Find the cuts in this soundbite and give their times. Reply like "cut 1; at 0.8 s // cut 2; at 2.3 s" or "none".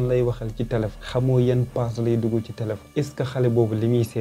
cut 1; at 1.0 s // cut 2; at 2.8 s